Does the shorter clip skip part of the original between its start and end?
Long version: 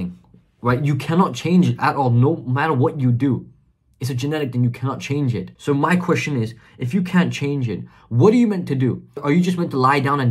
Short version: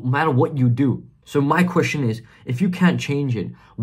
yes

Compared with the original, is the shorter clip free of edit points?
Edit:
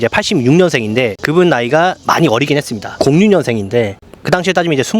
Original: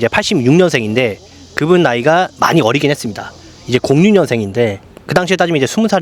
no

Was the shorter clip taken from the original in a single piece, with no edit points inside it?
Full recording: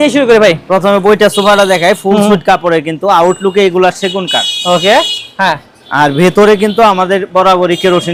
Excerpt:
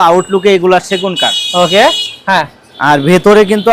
yes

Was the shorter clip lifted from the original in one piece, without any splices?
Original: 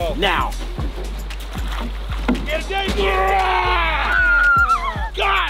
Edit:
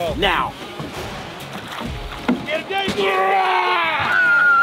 yes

